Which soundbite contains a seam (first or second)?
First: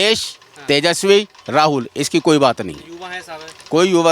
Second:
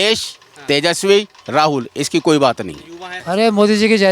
second